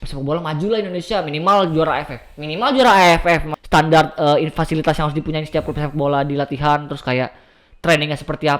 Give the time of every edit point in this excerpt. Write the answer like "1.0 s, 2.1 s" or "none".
3.5 s